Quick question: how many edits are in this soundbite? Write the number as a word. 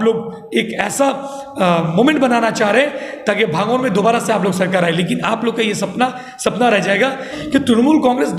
one